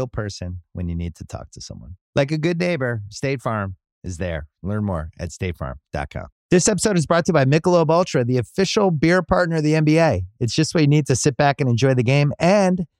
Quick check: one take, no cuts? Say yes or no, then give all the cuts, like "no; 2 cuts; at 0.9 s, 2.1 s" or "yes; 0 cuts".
no; 1 cut; at 6.3 s